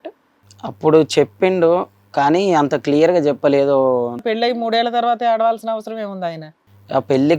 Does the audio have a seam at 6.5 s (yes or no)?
yes